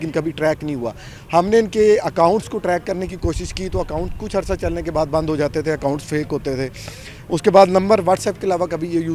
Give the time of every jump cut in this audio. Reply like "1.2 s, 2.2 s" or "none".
none

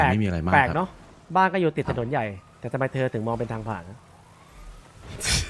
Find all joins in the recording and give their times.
none

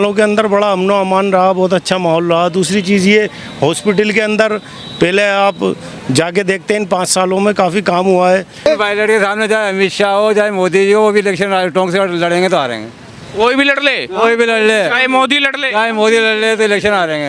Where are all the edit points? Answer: 8.7 s

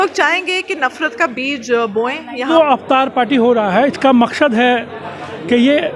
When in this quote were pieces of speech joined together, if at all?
2.4 s

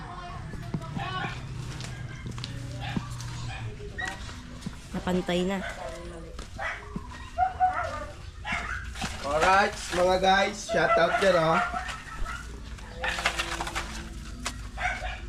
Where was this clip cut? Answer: none

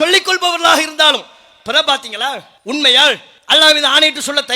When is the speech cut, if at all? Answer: 2.5 s, 3.3 s

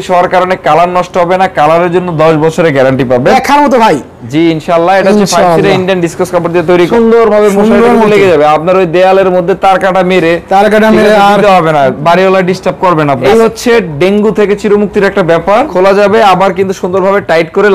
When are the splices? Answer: 3.3 s, 6.9 s, 13.2 s, 15.7 s

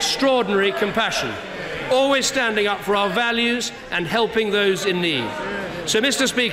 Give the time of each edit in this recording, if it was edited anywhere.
5.4 s

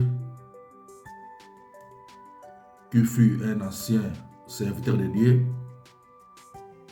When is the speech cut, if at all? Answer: 5.8 s

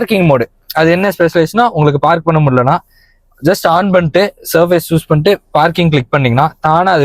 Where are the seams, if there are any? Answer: none

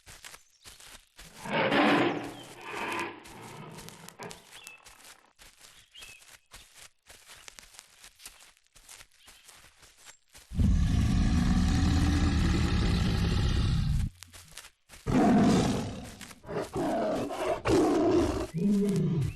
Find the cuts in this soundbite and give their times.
1.2 s

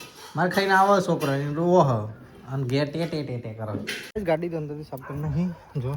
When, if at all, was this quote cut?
4.2 s

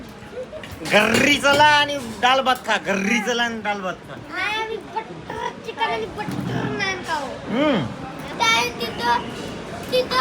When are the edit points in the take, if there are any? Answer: 8.3 s

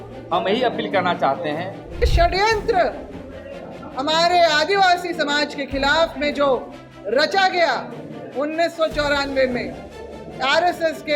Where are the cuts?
2.0 s

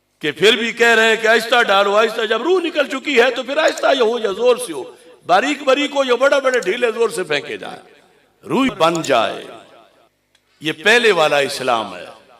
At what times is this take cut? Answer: 8.7 s

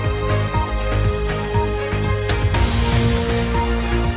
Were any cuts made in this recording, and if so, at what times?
2.4 s

